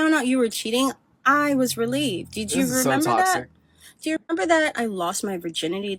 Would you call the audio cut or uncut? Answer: uncut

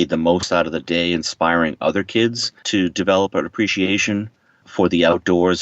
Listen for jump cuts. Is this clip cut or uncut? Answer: cut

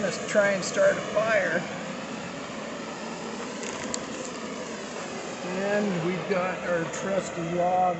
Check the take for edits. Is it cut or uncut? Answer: uncut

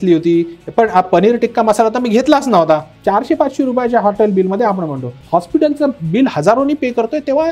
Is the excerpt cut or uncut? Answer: cut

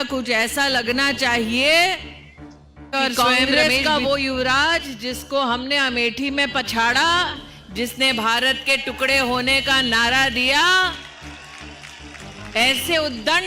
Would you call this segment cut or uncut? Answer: uncut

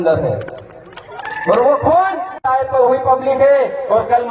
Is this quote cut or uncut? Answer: cut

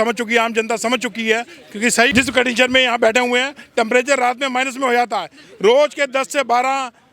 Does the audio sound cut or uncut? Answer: cut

